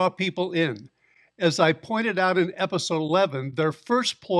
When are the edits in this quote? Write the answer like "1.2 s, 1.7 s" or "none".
none